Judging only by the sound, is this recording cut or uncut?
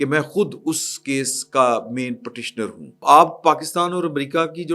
cut